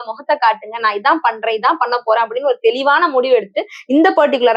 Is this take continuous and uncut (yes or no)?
yes